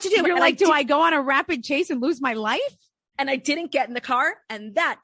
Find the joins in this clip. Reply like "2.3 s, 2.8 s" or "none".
none

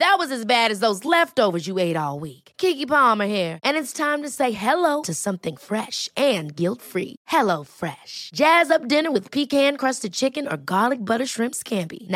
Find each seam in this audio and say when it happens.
none

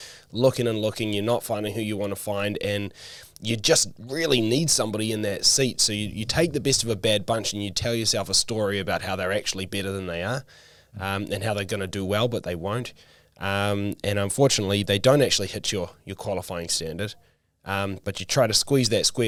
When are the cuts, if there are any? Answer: none

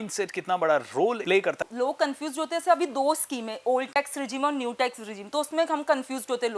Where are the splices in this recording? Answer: 1.6 s

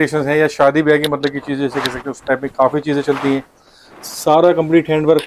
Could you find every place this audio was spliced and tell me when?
none

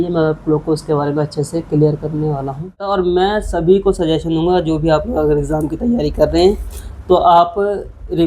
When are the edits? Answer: 2.9 s

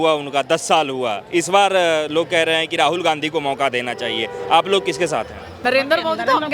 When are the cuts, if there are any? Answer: 5.6 s

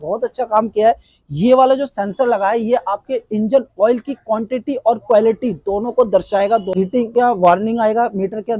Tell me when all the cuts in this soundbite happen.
none

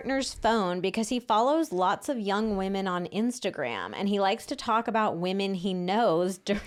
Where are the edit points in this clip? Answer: none

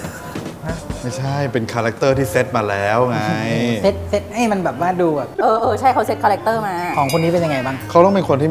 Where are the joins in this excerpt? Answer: none

